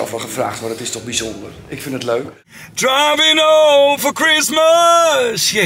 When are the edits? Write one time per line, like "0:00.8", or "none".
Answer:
0:02.4